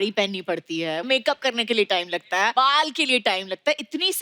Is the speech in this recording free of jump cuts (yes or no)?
no